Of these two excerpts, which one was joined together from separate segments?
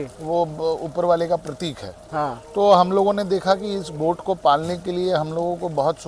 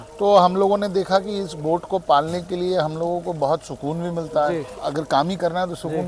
second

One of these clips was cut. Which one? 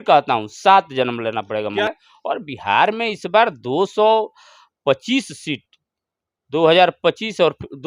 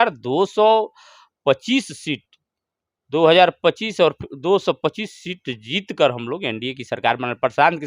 first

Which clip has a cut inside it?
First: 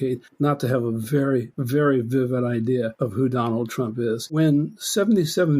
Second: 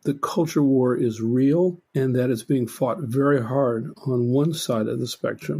first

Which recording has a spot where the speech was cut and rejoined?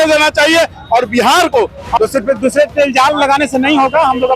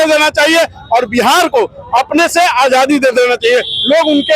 first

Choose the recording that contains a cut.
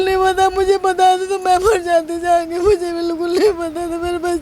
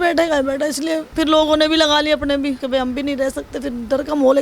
second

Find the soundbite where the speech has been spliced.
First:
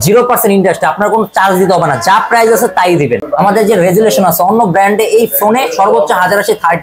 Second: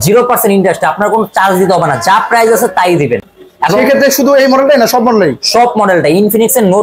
first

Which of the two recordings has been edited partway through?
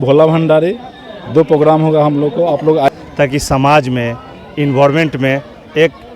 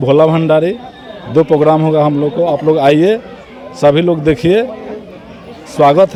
first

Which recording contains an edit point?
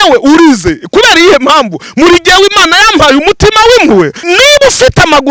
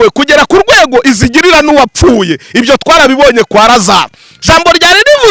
first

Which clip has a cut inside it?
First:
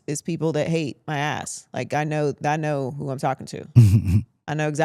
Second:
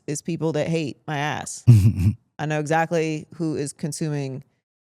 second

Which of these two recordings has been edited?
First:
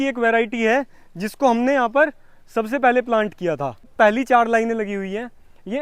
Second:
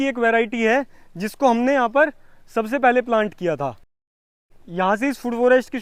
first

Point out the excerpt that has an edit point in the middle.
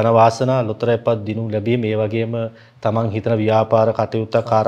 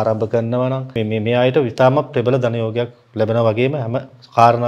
second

